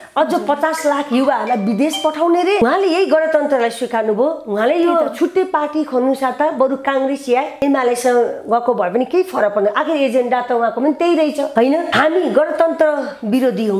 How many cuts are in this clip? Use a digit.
2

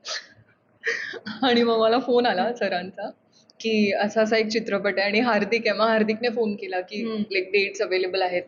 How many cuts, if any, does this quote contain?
0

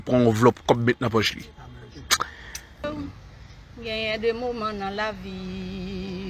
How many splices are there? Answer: 1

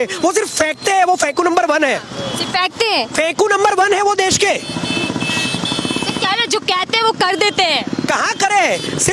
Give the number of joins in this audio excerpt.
0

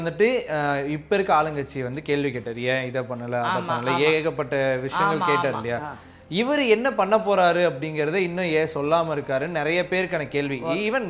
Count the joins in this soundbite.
0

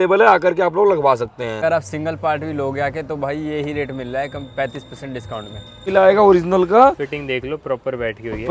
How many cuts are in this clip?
2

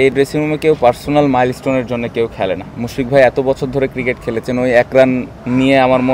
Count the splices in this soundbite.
0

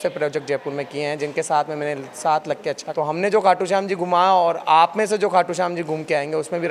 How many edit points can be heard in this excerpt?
1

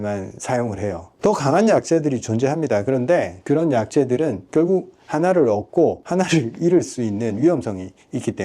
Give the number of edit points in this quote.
2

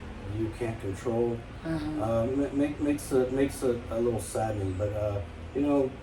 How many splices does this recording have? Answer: 0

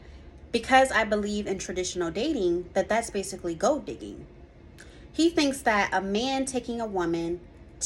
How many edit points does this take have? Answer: 0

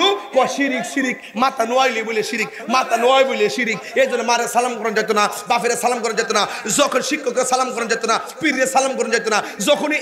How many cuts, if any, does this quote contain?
0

